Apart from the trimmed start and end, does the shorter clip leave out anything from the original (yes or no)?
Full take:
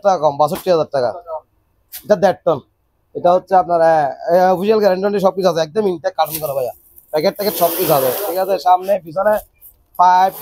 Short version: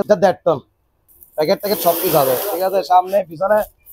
yes